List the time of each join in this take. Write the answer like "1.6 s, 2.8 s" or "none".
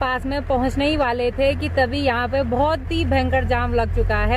none